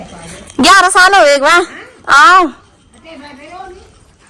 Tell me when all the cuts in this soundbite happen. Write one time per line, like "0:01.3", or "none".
none